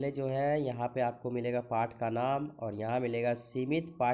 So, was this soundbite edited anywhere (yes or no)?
no